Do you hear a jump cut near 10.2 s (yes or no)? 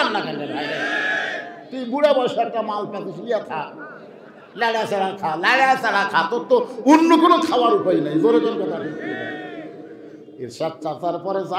yes